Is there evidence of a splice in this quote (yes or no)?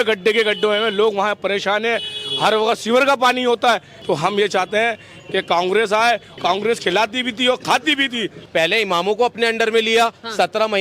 yes